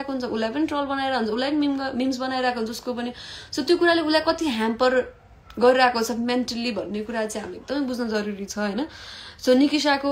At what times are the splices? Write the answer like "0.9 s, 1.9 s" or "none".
none